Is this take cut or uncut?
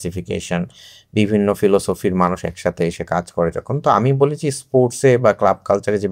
uncut